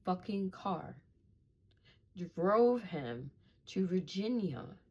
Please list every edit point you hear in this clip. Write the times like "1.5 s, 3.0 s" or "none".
none

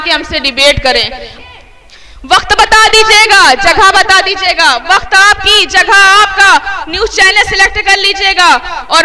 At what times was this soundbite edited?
1.3 s

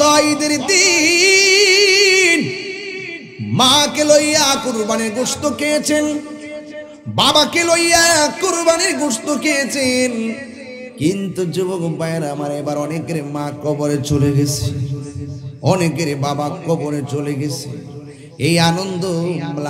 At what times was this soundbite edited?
none

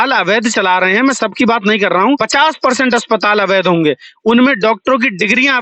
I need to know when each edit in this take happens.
2.2 s

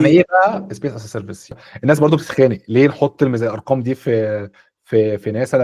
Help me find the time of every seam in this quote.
1.7 s

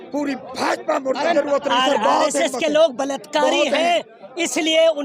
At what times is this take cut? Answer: 1.3 s

